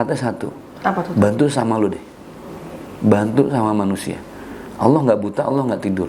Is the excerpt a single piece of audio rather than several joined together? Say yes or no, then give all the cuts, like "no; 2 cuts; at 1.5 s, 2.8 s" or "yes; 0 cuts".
yes; 0 cuts